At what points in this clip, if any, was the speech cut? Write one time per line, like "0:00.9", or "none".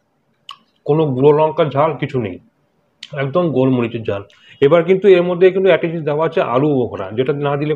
none